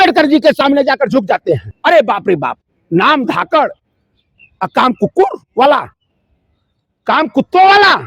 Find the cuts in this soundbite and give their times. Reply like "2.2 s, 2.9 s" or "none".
1.7 s

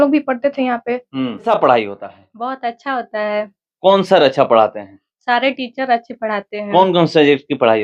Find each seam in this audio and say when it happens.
1.5 s

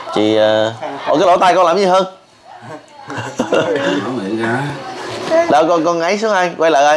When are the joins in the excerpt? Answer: none

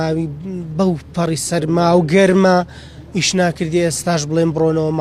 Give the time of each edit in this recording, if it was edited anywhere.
none

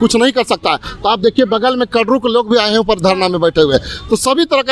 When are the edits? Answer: none

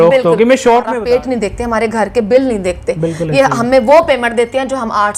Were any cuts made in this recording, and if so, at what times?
1.0 s

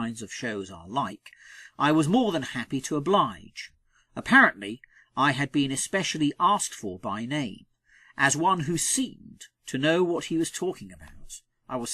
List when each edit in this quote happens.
none

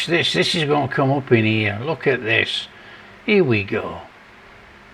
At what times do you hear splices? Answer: none

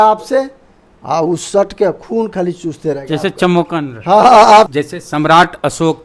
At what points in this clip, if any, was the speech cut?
4.7 s

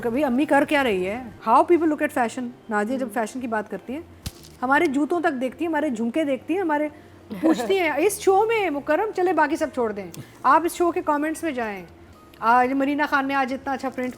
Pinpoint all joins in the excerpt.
1.3 s

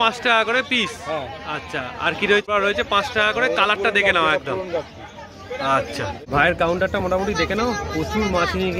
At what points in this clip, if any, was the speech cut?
2.5 s, 6.2 s

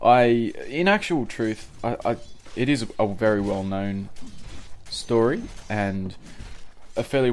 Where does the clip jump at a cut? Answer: 4.6 s

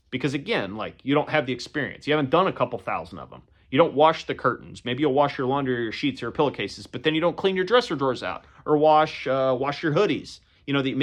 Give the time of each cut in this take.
none

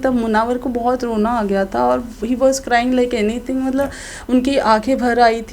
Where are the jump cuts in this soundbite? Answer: none

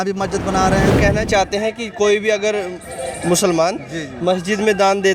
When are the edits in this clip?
0.9 s

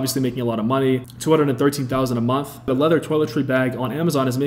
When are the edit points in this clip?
1.1 s, 2.7 s

